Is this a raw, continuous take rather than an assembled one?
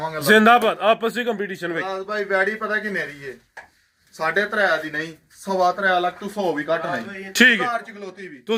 yes; 0 cuts

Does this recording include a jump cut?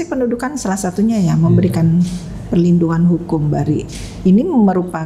no; 0 cuts

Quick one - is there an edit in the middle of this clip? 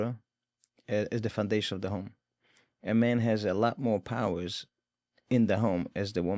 no; 0 cuts

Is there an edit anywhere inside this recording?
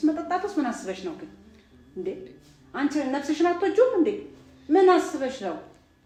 no; 0 cuts

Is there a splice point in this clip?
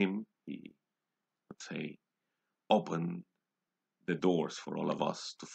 no; 0 cuts

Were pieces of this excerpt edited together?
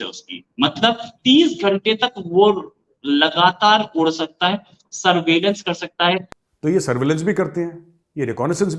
yes; 1 cut; at 6.3 s

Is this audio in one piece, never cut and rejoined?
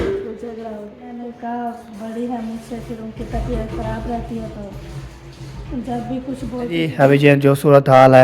no; 2 cuts; at 1.1 s, 6.7 s

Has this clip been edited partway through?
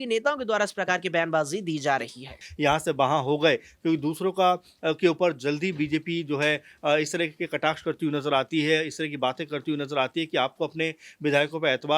yes; 1 cut; at 2.4 s

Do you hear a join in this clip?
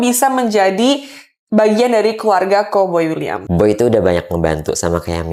no; 0 cuts

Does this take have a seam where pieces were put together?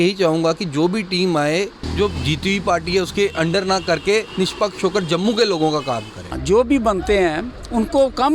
yes; 2 cuts; at 1.8 s, 6.4 s

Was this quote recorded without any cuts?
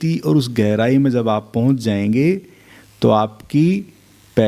yes; 0 cuts

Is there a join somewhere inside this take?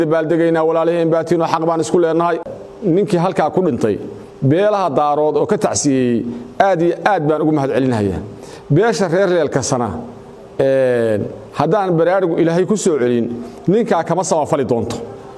yes; 1 cut; at 2.4 s

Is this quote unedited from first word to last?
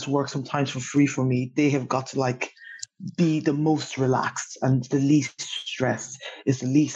yes; 0 cuts

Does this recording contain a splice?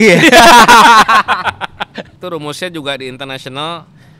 yes; 1 cut; at 2.1 s

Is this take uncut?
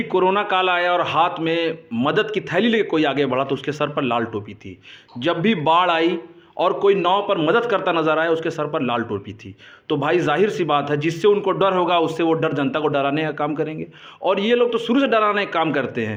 yes; 0 cuts

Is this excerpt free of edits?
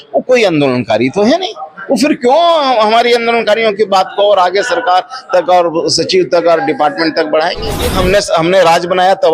no; 1 cut; at 7.9 s

